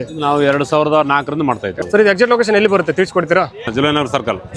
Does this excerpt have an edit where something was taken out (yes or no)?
yes